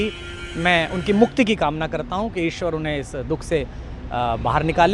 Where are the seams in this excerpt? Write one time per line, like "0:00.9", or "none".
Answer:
none